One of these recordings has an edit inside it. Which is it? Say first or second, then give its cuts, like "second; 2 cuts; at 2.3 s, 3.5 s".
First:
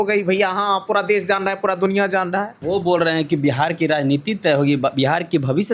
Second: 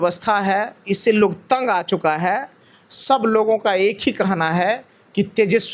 first; 1 cut; at 2.6 s